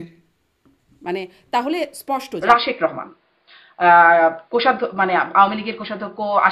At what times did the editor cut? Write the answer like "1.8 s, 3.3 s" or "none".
2.4 s